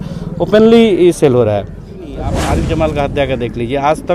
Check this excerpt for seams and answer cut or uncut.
cut